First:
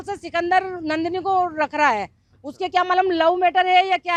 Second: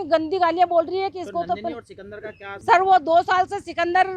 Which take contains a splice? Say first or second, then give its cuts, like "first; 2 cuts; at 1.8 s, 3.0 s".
second; 1 cut; at 2.5 s